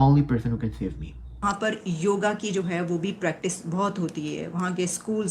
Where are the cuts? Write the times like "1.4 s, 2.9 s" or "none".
1.4 s